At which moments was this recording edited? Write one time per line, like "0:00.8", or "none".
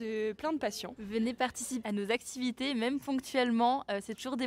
0:00.9

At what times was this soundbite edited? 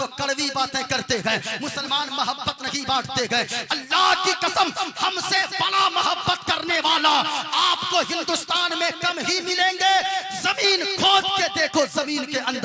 none

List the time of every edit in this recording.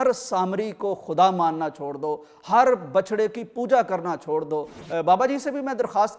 0:04.8

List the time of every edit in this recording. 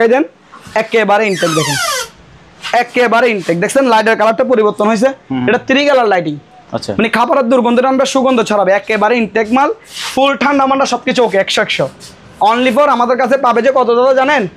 none

